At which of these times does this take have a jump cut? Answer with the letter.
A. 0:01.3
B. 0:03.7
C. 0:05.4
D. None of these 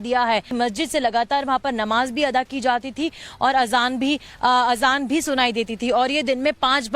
B